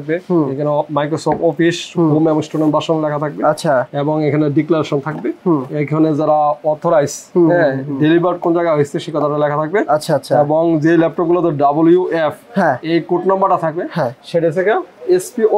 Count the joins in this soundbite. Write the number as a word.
zero